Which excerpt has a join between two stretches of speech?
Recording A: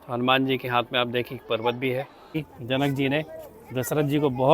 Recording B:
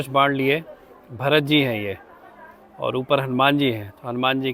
A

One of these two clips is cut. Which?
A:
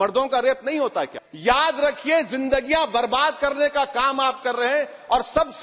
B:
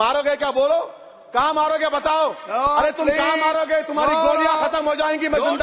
A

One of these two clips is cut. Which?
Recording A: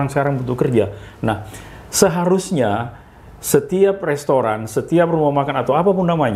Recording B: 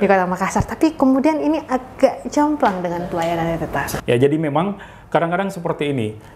B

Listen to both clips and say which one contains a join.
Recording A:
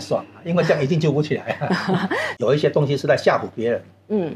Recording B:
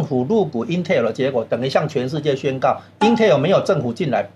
A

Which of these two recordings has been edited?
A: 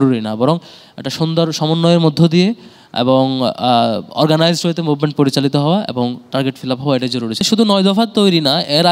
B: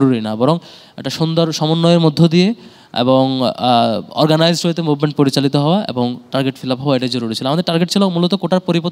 A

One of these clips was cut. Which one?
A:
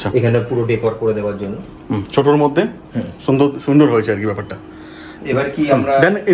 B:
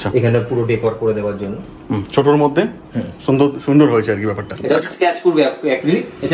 B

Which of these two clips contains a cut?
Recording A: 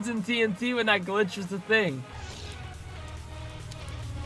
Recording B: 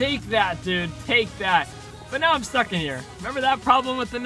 A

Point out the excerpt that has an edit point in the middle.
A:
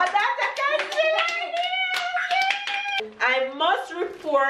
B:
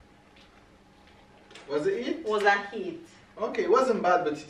A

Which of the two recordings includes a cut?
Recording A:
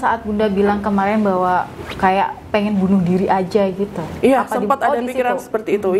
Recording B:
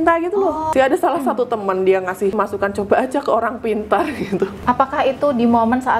B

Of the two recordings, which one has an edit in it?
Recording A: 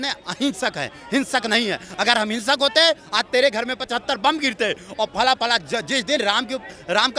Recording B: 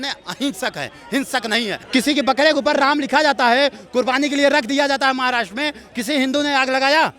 B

